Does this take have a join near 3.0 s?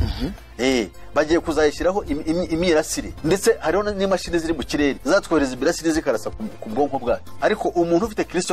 yes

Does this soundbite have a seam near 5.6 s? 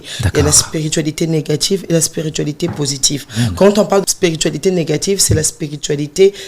no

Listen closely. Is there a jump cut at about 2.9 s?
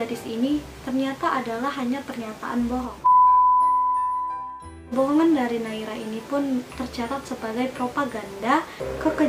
yes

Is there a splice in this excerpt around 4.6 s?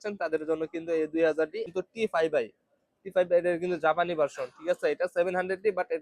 no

